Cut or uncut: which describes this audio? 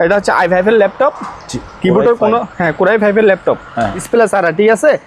cut